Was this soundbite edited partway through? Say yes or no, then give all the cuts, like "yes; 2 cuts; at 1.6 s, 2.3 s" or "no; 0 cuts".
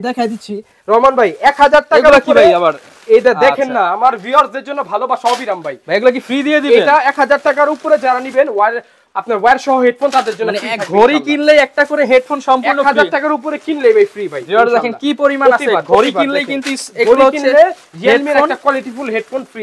no; 0 cuts